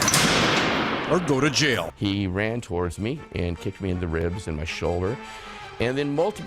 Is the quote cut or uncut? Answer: cut